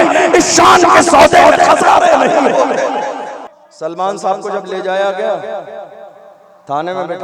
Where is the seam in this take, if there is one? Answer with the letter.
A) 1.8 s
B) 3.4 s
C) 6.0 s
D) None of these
B